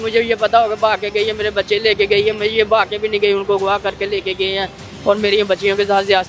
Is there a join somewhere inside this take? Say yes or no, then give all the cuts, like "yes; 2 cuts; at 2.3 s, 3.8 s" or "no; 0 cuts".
no; 0 cuts